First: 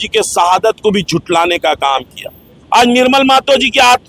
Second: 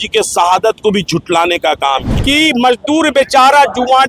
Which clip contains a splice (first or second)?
second